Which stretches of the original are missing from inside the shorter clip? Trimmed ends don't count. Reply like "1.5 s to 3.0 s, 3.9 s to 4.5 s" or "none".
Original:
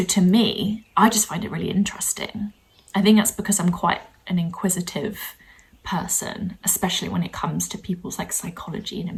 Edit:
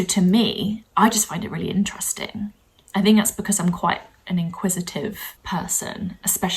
5.3 s to 5.7 s